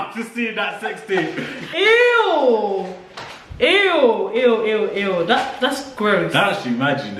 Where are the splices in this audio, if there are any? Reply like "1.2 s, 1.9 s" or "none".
none